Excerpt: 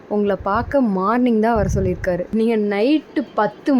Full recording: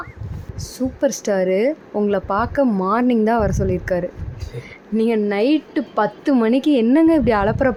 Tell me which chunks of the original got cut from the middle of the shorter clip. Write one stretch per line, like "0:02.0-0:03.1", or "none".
0:04.1-0:04.8